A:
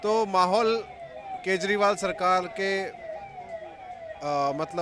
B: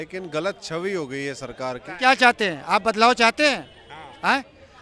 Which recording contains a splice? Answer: B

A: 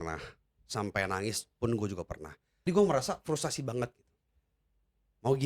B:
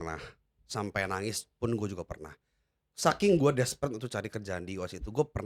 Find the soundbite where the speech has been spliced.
A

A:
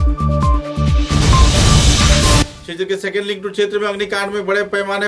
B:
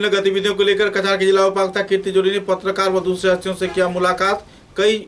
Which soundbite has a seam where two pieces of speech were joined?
A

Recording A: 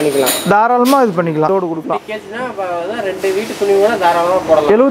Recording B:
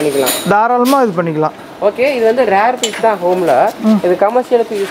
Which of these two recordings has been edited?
A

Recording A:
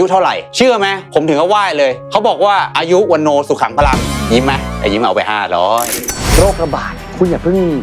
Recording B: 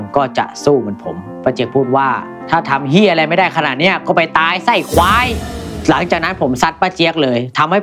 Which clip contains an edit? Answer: A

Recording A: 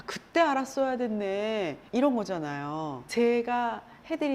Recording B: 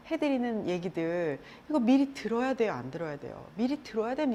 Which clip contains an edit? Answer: A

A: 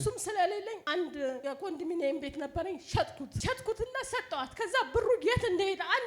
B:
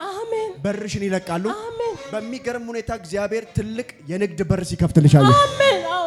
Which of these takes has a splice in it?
A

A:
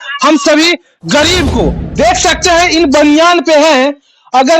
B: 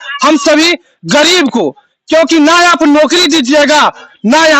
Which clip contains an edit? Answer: A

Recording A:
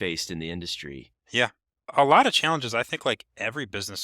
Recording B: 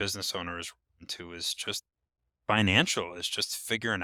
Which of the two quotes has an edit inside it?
A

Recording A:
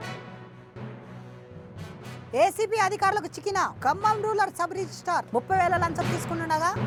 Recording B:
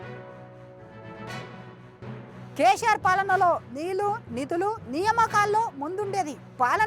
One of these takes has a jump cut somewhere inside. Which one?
B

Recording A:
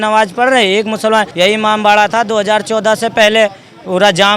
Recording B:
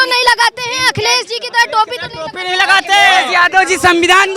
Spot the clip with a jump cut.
A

